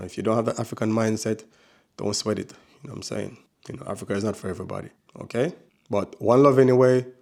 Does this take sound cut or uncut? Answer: uncut